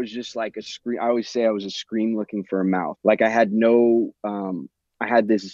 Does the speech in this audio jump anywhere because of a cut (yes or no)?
yes